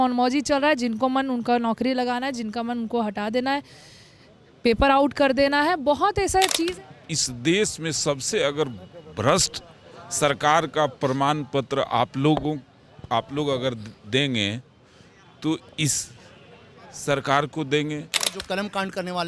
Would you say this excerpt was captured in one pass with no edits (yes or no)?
no